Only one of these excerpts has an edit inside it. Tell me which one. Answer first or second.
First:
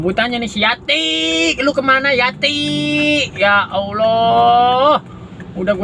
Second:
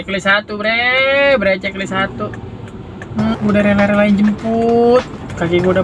second